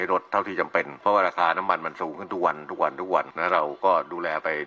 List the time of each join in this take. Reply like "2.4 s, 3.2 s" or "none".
0.9 s, 3.3 s